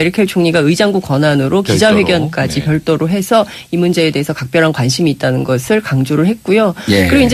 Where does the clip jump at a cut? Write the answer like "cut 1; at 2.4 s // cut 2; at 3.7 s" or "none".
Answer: none